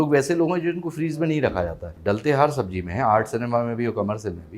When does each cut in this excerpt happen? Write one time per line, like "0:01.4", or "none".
0:01.9